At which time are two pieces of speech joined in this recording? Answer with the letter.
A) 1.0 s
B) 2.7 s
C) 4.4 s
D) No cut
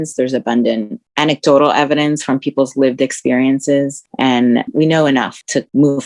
C